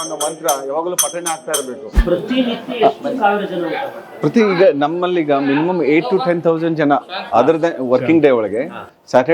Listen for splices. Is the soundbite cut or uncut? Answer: cut